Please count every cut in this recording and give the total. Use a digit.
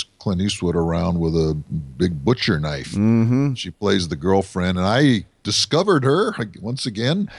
0